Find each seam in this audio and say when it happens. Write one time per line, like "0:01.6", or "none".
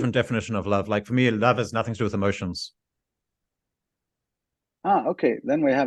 none